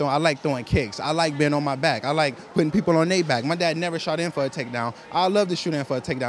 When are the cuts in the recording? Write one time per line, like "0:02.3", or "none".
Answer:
0:01.3